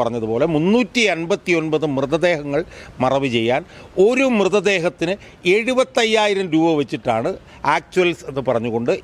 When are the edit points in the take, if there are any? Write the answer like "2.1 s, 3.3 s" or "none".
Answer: none

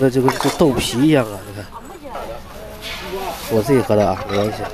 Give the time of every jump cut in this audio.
2.2 s

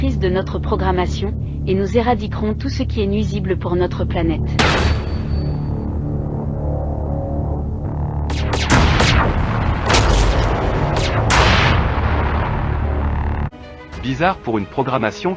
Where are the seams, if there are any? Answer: 13.5 s

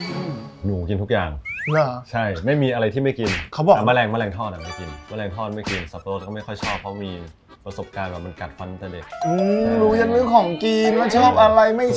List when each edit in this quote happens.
9.1 s

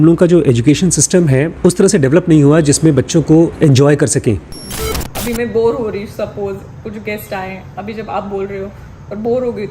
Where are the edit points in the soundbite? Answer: 1.5 s, 3.5 s, 4.9 s

